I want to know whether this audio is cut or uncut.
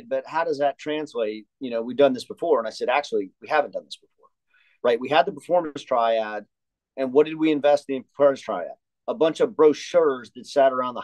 uncut